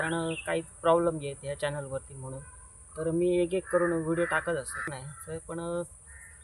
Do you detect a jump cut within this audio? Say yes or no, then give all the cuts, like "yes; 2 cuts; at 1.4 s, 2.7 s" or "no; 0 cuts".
yes; 1 cut; at 5.0 s